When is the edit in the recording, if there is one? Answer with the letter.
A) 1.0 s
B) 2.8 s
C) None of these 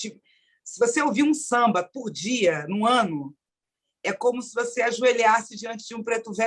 C